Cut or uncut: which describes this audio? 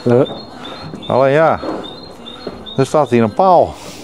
uncut